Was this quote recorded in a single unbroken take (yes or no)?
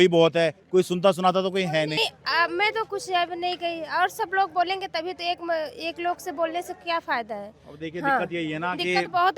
no